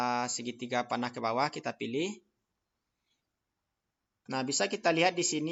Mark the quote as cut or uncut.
uncut